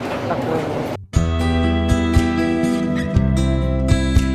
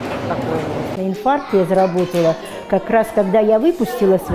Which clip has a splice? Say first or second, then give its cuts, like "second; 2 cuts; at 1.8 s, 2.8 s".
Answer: second; 1 cut; at 1.0 s